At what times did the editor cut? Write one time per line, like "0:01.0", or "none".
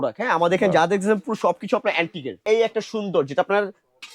0:02.4